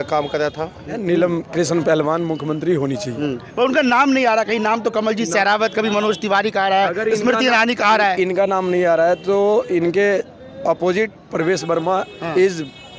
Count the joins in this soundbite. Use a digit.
1